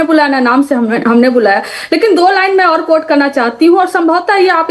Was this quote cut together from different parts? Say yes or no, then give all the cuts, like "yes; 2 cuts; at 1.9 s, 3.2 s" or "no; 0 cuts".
no; 0 cuts